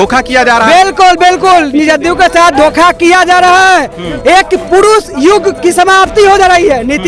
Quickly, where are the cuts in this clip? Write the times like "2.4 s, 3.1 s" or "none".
none